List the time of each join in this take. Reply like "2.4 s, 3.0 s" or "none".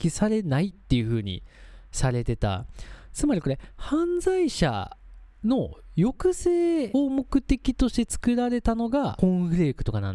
6.9 s, 9.1 s